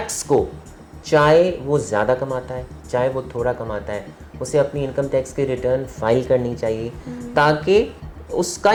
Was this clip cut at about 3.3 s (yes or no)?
no